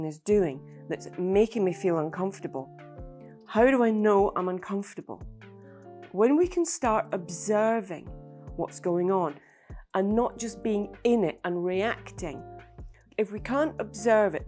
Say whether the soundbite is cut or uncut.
uncut